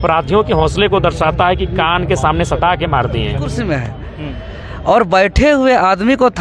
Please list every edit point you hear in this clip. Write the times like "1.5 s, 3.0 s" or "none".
3.5 s